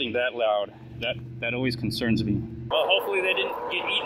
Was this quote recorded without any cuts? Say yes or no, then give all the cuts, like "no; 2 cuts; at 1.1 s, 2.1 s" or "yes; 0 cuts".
no; 1 cut; at 2.7 s